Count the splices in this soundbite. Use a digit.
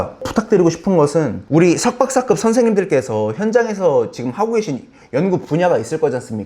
1